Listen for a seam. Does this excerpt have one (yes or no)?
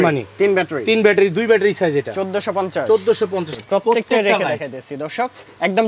yes